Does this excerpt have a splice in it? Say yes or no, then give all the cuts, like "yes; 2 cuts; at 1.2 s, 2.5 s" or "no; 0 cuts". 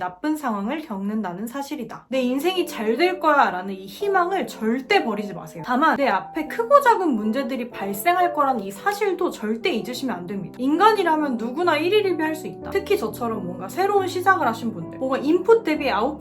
yes; 3 cuts; at 2.0 s, 10.5 s, 15.0 s